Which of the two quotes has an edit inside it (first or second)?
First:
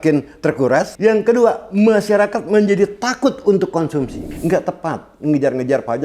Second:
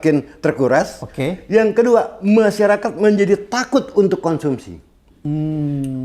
first